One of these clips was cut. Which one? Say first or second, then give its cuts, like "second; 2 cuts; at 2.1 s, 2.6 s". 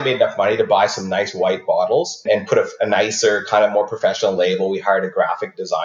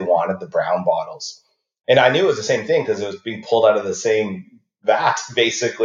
first; 1 cut; at 2.2 s